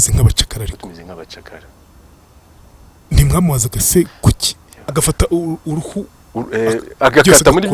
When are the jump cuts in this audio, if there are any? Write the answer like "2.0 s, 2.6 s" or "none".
4.9 s